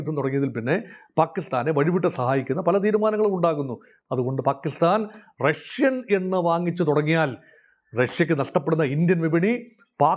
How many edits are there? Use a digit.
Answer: 1